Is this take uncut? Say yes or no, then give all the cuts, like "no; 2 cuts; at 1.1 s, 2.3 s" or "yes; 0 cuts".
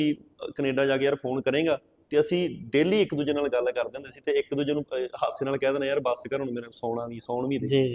yes; 0 cuts